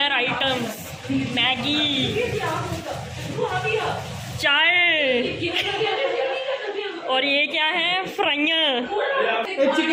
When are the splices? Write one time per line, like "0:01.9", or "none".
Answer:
none